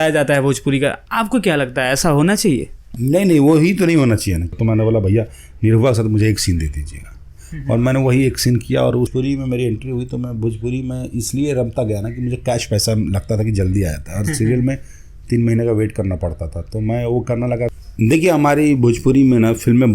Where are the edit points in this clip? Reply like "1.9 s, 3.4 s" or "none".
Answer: 4.5 s, 9.1 s, 17.7 s